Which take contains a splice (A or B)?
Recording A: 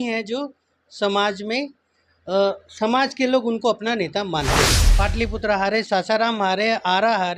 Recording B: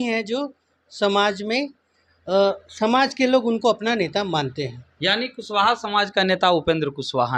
A